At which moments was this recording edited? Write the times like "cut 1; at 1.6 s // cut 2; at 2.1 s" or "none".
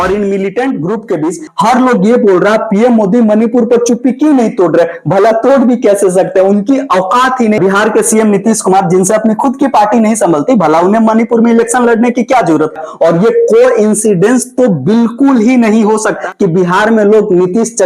cut 1; at 1.5 s // cut 2; at 7.6 s // cut 3; at 12.9 s